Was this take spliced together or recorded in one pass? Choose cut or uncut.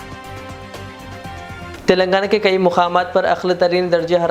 cut